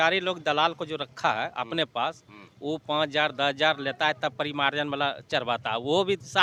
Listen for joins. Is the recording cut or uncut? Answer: uncut